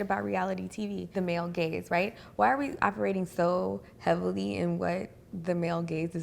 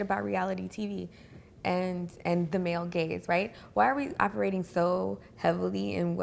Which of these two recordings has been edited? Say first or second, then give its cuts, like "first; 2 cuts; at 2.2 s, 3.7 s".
first; 1 cut; at 1.1 s